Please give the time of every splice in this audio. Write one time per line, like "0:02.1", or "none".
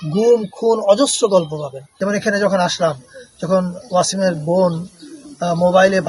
0:01.9